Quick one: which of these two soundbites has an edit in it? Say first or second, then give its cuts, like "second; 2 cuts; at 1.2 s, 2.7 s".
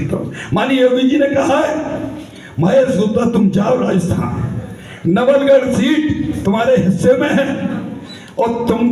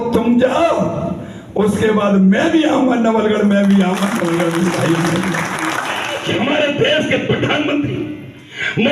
second; 1 cut; at 6.1 s